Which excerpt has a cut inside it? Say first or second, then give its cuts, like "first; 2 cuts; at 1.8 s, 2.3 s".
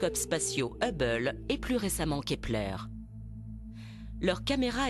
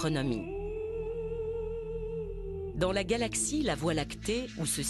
first; 1 cut; at 0.9 s